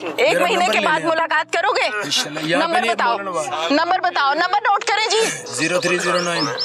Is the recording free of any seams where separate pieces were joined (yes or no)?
no